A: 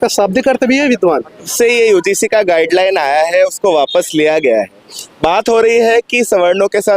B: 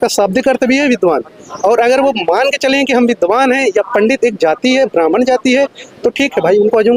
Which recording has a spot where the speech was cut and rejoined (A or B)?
A